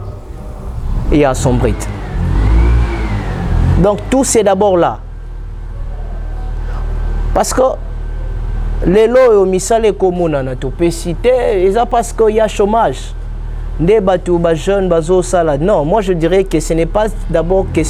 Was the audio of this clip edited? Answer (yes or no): no